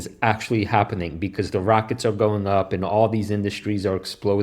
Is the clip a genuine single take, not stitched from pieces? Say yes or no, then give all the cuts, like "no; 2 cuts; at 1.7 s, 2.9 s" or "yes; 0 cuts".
yes; 0 cuts